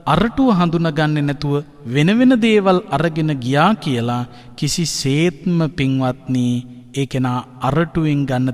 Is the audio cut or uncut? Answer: uncut